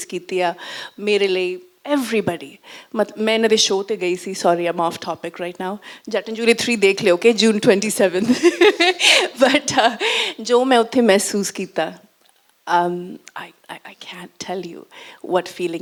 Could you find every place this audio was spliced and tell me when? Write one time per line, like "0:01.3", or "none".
none